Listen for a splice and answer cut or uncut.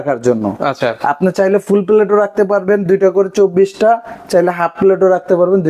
uncut